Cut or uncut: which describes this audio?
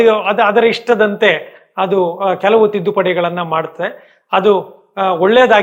uncut